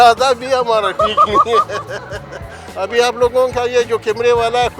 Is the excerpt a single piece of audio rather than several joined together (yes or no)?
no